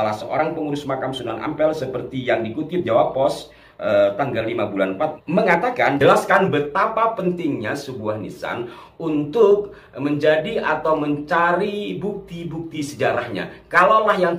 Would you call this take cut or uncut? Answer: cut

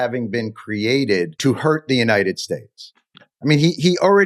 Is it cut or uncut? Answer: cut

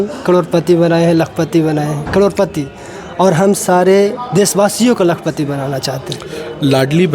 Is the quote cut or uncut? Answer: uncut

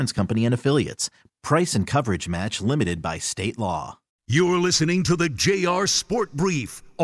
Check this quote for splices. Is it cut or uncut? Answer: cut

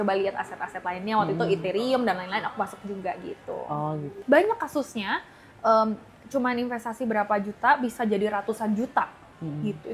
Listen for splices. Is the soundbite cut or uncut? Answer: cut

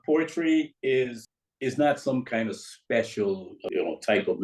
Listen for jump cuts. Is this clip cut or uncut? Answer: cut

